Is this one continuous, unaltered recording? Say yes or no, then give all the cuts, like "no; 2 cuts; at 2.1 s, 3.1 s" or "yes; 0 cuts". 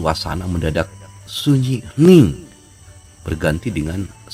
yes; 0 cuts